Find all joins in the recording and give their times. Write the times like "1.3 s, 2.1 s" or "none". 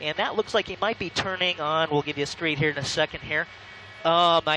3.2 s

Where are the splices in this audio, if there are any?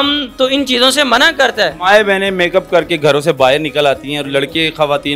none

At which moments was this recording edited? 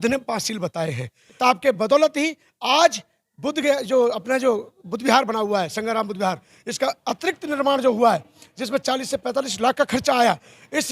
1.4 s

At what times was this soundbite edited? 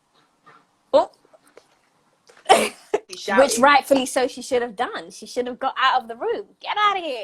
3.1 s

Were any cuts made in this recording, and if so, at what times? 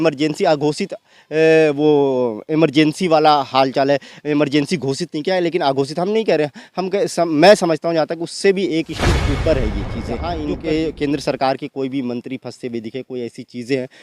10.3 s

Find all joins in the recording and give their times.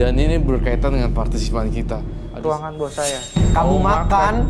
2.2 s

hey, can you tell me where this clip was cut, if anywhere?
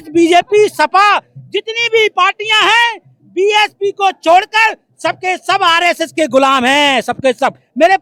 none

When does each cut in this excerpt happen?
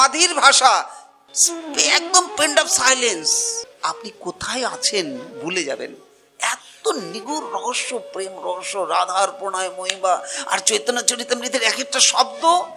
3.7 s

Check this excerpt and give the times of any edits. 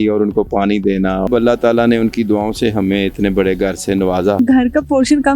1.3 s, 4.4 s

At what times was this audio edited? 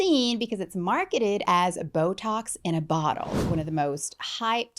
3.5 s

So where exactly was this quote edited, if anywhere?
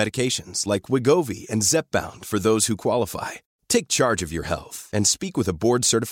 none

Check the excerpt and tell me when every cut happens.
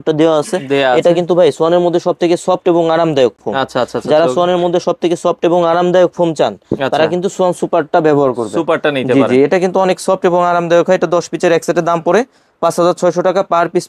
none

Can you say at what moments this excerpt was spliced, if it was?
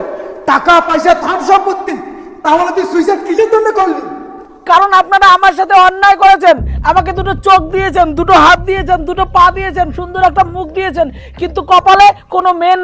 none

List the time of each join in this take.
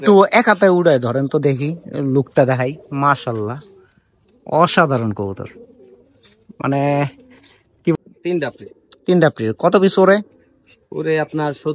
7.9 s

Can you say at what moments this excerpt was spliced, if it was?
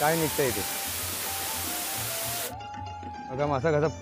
2.5 s

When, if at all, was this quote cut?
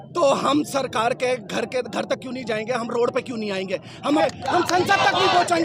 4.2 s

